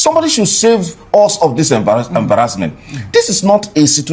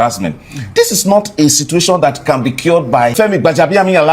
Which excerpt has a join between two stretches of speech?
second; 1 cut; at 3.1 s

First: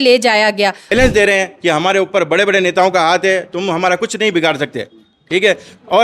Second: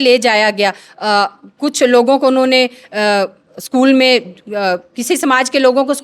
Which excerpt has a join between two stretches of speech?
first; 1 cut; at 0.9 s

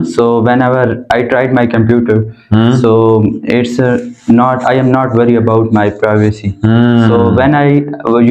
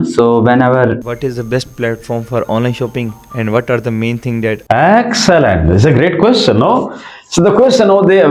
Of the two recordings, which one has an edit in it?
second; 2 cuts; at 1.0 s, 4.6 s

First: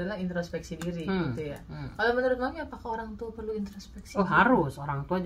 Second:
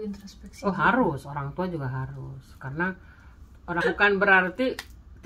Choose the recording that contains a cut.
second; 1 cut; at 3.8 s

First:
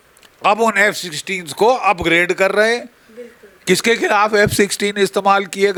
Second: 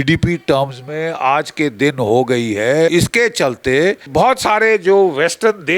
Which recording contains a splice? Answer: second; 2 cuts; at 2.9 s, 4.1 s

